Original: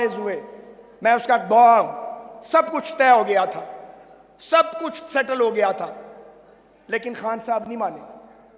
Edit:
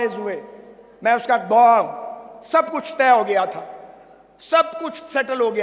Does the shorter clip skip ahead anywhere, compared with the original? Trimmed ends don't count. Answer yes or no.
no